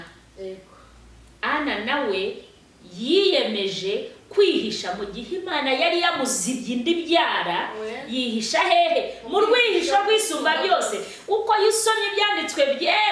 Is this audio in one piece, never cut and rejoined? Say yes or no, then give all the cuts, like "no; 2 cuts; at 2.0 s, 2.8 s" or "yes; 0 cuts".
yes; 0 cuts